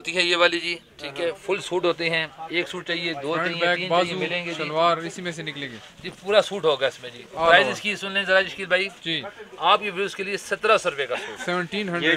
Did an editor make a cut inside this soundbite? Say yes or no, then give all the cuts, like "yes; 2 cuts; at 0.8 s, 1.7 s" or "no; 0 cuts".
no; 0 cuts